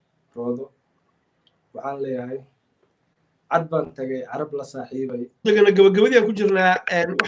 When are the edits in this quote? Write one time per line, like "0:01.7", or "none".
0:05.4